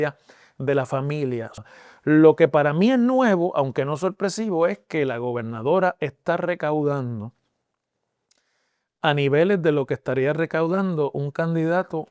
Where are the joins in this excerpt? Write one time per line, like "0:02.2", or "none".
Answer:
0:01.6